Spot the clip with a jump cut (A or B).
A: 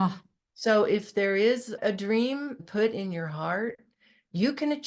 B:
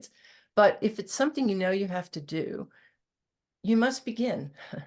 A